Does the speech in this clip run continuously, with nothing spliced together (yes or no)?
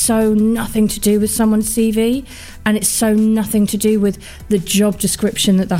yes